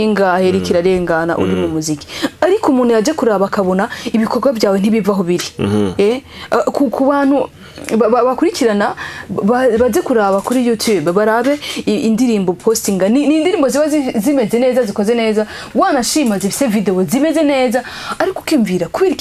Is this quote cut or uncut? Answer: uncut